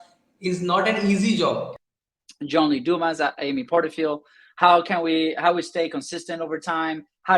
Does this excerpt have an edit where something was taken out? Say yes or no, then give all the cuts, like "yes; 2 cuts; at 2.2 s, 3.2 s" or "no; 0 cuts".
yes; 1 cut; at 1.9 s